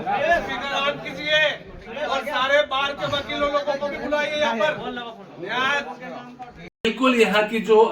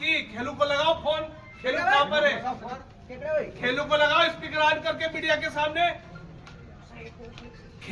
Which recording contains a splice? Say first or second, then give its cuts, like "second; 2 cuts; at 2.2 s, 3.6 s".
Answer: first; 1 cut; at 6.8 s